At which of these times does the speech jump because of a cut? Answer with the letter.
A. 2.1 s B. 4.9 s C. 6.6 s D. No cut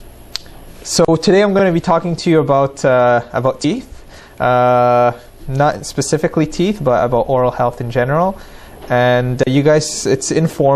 C